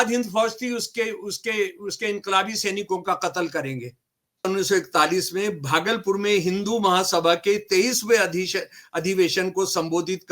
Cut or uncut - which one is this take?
cut